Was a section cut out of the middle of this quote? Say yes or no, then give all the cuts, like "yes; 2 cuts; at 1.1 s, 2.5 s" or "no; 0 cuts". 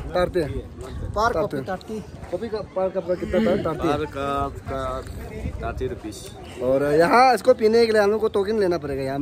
no; 0 cuts